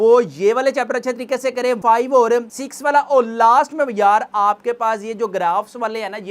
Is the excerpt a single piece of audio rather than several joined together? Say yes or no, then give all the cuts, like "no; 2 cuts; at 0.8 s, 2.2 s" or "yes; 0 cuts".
no; 1 cut; at 1.8 s